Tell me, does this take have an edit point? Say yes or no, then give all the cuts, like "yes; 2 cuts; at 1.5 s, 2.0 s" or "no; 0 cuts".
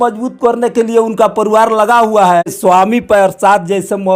yes; 1 cut; at 2.6 s